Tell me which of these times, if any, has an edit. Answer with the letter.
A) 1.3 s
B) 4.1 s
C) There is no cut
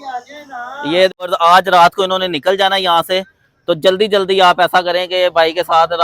A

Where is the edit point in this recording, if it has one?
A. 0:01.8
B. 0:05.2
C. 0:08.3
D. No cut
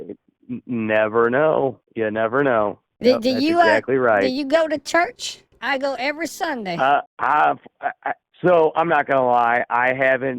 D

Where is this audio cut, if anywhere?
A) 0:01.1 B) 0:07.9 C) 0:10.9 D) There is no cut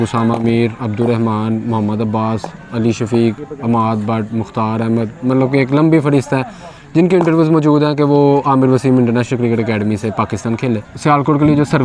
C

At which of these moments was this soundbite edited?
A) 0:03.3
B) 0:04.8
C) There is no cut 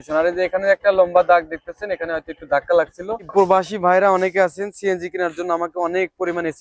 A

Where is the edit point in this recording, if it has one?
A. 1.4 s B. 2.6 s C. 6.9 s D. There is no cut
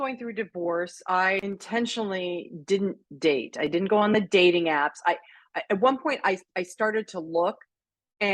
A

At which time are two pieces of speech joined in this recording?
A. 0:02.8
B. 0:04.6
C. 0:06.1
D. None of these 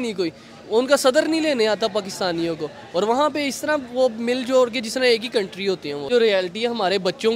C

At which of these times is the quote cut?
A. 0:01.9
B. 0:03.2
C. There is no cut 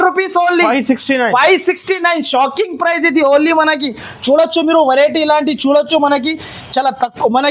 C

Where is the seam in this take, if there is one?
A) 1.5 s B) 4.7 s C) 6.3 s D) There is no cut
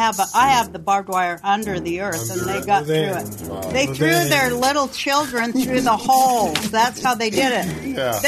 D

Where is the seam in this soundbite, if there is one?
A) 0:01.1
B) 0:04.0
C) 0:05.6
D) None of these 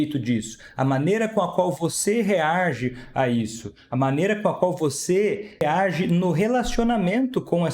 C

